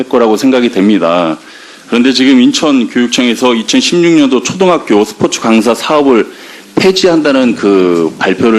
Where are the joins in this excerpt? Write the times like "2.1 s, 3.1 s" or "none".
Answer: none